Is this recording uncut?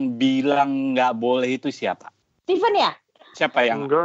yes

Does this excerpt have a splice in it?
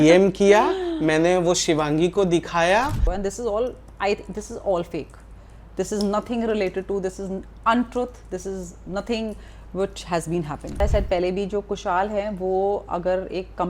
yes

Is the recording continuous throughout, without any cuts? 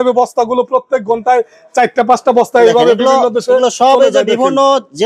yes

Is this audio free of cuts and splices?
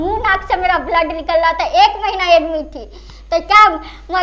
yes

